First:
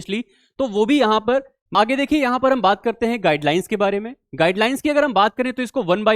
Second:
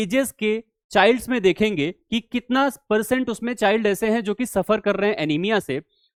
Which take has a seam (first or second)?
first